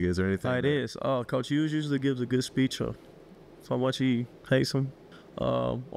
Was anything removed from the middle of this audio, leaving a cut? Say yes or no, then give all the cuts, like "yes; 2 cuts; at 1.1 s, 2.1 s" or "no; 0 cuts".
no; 0 cuts